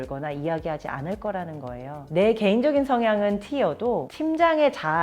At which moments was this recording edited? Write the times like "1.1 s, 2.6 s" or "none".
4.1 s